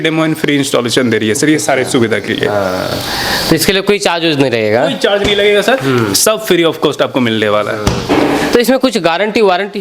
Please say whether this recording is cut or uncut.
uncut